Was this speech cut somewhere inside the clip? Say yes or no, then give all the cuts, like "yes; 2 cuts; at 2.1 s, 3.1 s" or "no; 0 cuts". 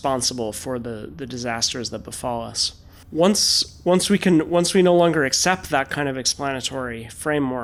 no; 0 cuts